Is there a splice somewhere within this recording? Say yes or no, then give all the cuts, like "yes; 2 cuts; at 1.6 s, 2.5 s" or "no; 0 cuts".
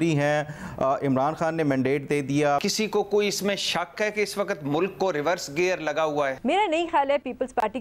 yes; 2 cuts; at 2.6 s, 6.4 s